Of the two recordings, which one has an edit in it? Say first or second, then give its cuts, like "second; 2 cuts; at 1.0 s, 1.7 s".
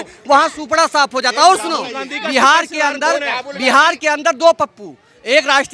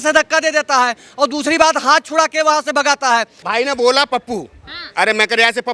second; 1 cut; at 3.4 s